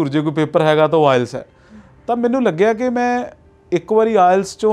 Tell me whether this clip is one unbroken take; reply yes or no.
yes